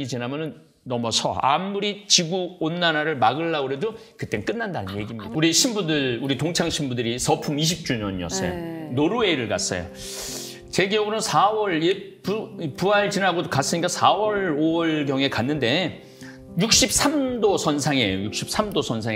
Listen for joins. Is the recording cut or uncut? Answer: cut